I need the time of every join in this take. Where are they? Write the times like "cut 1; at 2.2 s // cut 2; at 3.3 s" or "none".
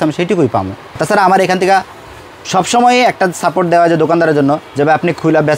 cut 1; at 1.0 s